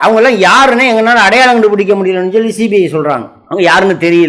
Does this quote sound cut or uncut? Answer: uncut